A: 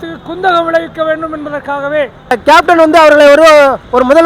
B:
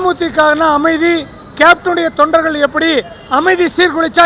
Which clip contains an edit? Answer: A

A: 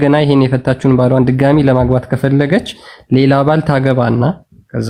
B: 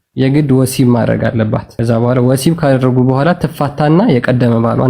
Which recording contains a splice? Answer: B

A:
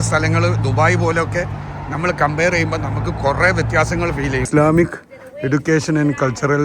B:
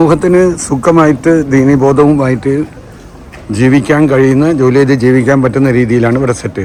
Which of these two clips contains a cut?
A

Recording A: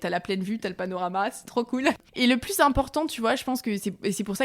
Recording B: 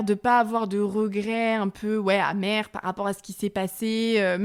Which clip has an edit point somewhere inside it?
A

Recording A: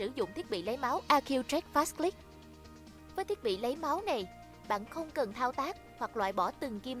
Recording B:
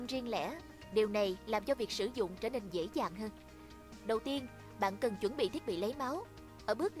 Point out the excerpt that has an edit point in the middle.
A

